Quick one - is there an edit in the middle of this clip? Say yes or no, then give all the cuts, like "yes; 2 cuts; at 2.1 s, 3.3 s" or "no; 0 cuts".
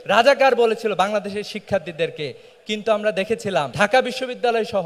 yes; 1 cut; at 3.7 s